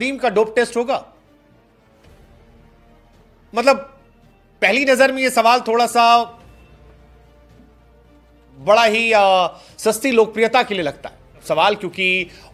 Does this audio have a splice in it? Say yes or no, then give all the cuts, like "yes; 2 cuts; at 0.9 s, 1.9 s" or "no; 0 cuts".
no; 0 cuts